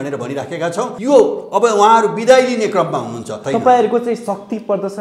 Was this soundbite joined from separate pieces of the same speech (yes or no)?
yes